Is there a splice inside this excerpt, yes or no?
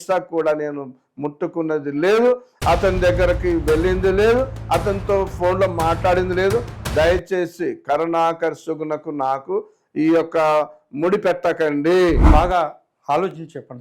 yes